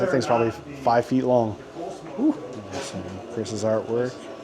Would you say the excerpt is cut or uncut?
cut